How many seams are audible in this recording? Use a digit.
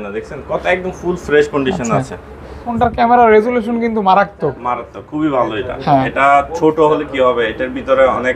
1